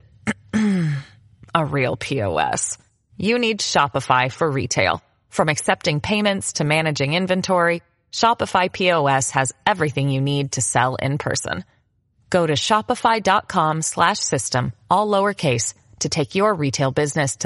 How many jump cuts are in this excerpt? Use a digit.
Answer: 0